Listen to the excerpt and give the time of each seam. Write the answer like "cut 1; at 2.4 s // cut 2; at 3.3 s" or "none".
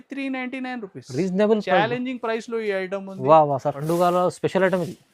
cut 1; at 3.8 s